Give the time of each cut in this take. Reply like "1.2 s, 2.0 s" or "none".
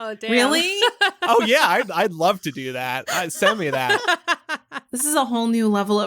5.0 s